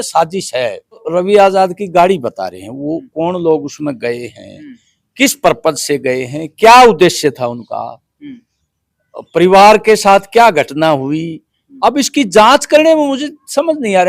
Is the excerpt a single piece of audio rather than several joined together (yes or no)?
no